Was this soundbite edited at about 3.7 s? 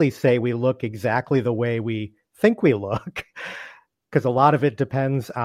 no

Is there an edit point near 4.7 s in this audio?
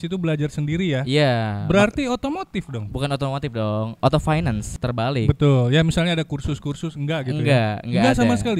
yes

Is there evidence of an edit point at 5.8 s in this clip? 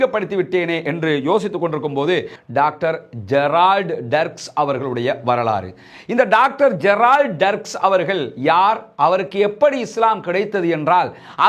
no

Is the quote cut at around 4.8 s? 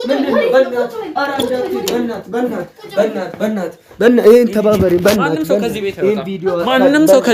no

